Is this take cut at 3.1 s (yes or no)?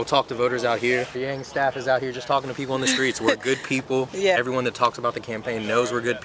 no